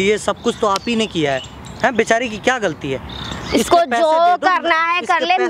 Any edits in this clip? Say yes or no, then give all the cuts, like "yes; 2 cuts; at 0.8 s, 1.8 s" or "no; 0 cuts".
no; 0 cuts